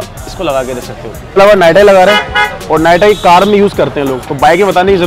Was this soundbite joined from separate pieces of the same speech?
yes; 1 cut; at 1.4 s

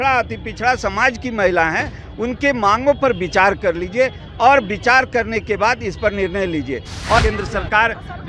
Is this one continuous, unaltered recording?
no; 1 cut; at 7.2 s

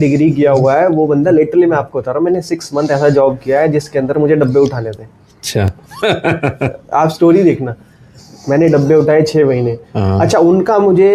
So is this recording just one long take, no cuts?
yes; 0 cuts

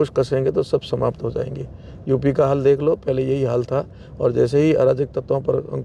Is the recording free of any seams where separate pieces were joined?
yes; 0 cuts

